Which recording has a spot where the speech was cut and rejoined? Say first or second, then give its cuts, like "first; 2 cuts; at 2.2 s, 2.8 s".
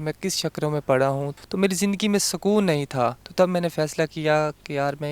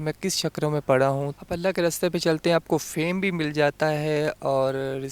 first; 1 cut; at 1.4 s